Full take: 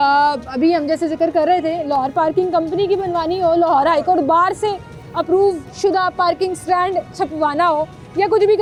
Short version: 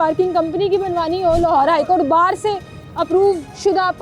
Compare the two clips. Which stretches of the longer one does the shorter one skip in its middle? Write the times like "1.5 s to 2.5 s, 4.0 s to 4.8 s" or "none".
none